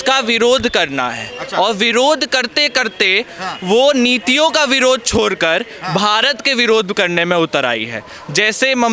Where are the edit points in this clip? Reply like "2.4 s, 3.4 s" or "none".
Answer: none